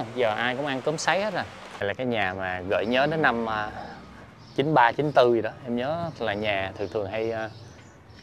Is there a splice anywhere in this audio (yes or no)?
yes